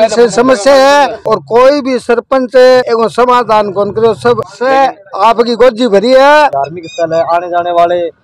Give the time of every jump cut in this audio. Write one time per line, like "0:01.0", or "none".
0:04.5
0:06.5